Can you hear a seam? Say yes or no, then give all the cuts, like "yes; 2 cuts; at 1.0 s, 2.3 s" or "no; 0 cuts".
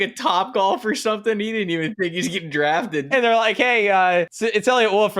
yes; 1 cut; at 4.3 s